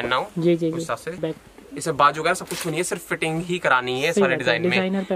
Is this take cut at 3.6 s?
no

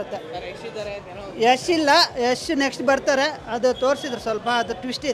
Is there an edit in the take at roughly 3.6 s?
no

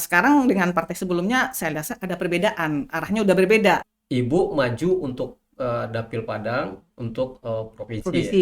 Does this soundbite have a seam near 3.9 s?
yes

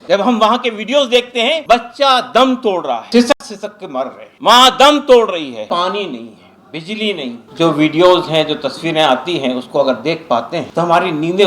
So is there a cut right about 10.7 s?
yes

